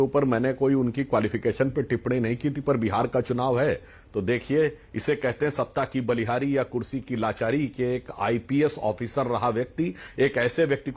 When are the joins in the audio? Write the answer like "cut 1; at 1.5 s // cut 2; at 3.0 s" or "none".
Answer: none